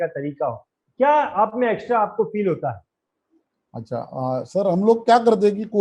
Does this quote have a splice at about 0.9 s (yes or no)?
no